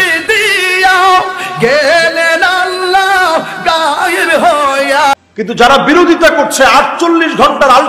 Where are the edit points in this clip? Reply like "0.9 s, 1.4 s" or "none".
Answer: 5.1 s